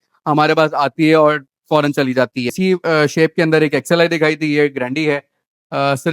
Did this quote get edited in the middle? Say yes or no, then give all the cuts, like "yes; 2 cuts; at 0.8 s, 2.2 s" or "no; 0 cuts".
yes; 1 cut; at 2.5 s